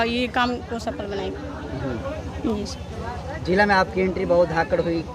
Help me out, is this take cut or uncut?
uncut